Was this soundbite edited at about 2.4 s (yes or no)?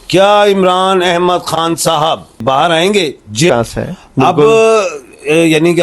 yes